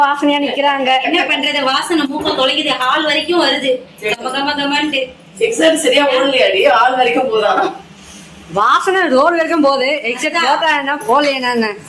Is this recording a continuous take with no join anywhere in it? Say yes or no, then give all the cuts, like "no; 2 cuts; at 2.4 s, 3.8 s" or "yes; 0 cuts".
yes; 0 cuts